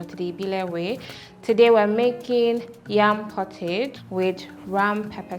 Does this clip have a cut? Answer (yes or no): yes